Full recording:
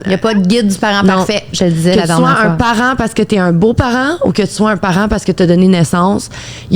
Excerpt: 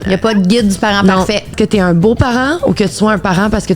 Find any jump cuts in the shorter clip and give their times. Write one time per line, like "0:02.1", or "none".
0:01.5